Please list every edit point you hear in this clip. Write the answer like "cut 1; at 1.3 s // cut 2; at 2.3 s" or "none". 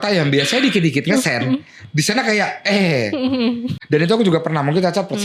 cut 1; at 3.7 s